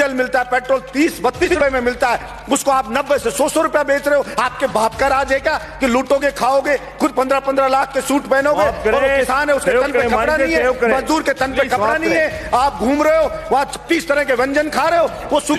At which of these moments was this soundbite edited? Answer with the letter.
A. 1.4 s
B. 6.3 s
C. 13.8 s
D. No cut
A